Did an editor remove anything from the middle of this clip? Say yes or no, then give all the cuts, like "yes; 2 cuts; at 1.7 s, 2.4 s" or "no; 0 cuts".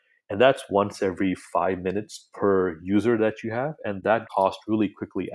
yes; 1 cut; at 4.3 s